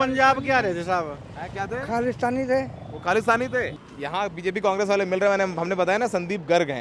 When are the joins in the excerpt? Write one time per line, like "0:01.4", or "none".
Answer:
0:03.8